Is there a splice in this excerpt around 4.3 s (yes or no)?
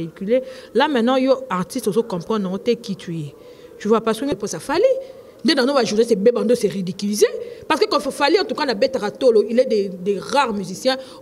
yes